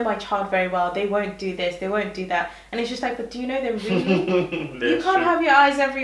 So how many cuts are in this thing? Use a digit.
0